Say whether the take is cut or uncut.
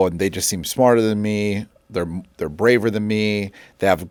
uncut